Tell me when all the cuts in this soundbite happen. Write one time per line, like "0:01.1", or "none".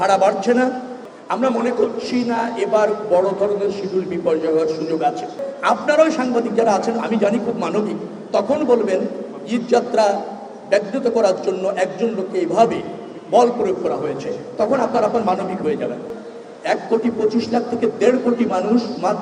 0:00.9
0:05.5
0:16.1